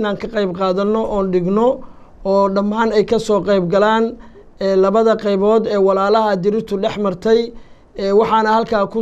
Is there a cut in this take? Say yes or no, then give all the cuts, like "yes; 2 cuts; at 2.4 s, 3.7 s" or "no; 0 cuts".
no; 0 cuts